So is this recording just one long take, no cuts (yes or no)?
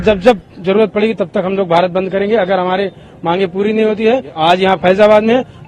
no